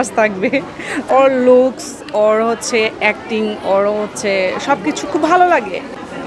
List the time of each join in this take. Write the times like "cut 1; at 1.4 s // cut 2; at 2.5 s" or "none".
cut 1; at 1.1 s // cut 2; at 5.5 s